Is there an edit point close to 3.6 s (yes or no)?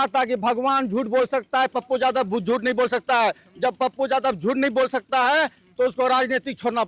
no